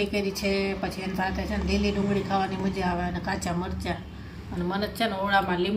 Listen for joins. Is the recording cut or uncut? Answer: uncut